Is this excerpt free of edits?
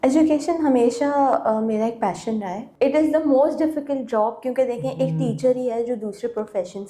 no; 1 cut; at 2.6 s

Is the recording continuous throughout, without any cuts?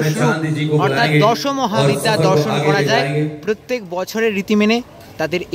yes; 0 cuts

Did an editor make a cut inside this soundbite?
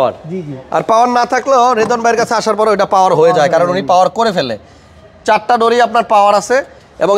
no; 0 cuts

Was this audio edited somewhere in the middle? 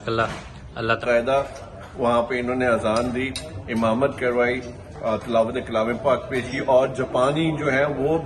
yes; 1 cut; at 1.0 s

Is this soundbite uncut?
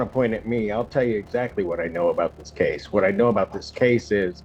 yes; 0 cuts

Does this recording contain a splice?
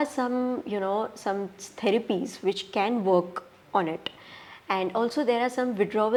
no; 0 cuts

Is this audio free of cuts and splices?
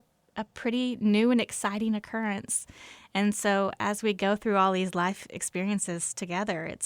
yes; 0 cuts

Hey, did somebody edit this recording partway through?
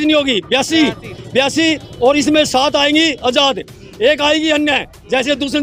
no; 0 cuts

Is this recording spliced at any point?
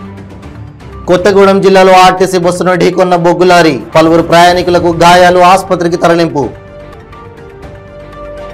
yes; 1 cut; at 1.0 s

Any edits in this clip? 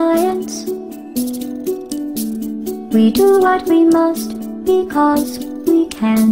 no; 0 cuts

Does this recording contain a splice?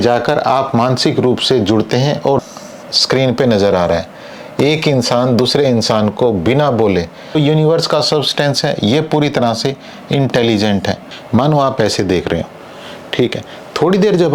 yes; 3 cuts; at 2.4 s, 7.4 s, 11.1 s

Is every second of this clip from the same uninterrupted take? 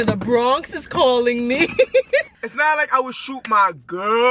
yes; 0 cuts

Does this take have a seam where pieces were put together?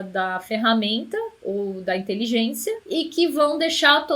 yes; 1 cut; at 2.8 s

